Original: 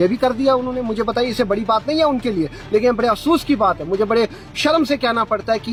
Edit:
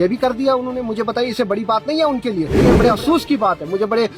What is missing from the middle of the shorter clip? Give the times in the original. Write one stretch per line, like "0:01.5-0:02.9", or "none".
0:02.6-0:02.8